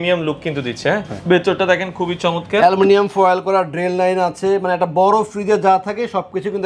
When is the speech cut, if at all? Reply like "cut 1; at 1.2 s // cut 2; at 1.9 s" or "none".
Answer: cut 1; at 1.1 s